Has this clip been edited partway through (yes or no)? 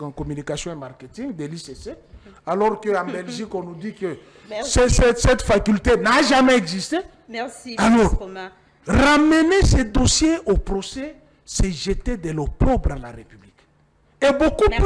no